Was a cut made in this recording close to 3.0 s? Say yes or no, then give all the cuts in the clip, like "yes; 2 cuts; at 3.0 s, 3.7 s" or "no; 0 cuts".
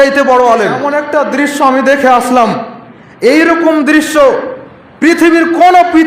no; 1 cut; at 0.9 s